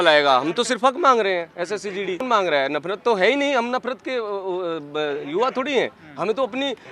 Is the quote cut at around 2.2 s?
no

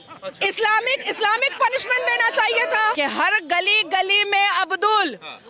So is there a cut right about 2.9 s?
yes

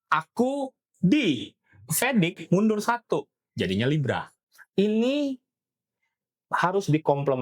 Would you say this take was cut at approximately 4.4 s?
yes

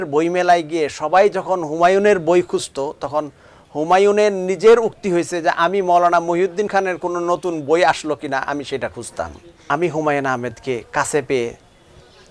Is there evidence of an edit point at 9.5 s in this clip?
yes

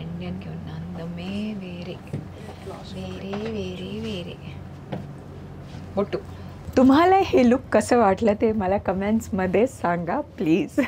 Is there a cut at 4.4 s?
no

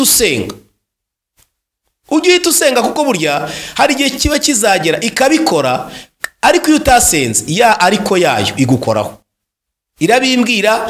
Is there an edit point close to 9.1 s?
no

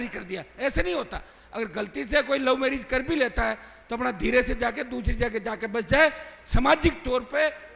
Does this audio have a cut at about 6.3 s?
no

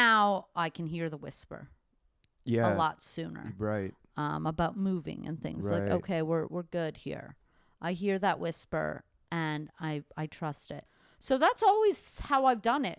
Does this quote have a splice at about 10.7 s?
yes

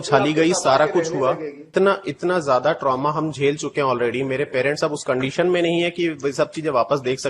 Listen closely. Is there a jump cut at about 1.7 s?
yes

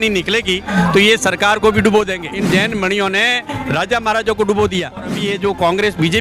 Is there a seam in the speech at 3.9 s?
no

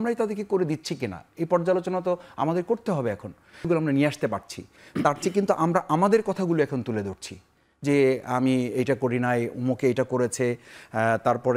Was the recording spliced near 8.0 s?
no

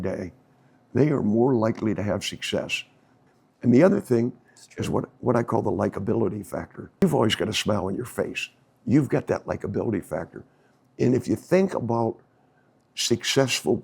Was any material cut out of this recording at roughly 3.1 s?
yes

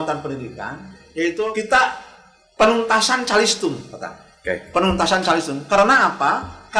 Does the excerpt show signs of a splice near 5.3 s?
no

